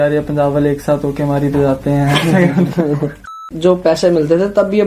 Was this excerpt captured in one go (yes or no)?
no